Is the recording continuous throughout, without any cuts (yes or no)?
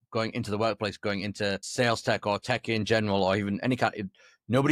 yes